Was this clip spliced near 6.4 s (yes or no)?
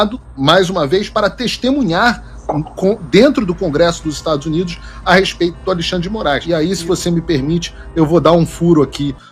yes